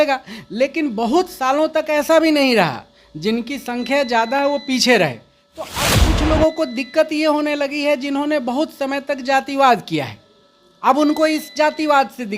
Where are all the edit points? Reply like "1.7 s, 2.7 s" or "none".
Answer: 5.8 s

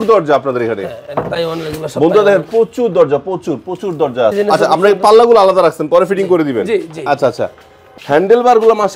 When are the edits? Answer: 4.3 s, 7.8 s

